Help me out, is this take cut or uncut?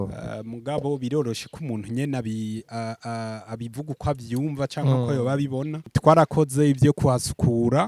cut